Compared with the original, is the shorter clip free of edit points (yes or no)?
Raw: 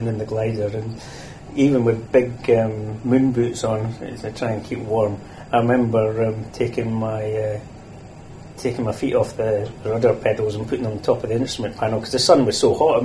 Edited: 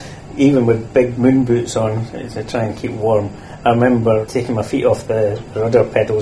no